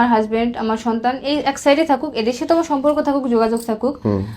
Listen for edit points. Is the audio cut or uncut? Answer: uncut